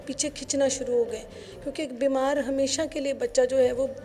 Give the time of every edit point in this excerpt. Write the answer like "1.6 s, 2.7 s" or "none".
none